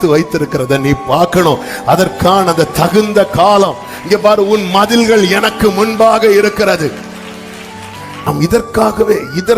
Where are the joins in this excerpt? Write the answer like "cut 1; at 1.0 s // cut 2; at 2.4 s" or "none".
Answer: cut 1; at 8.3 s